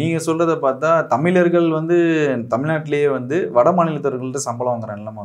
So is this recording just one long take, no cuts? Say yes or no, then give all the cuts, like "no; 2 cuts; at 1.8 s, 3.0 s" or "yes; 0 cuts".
yes; 0 cuts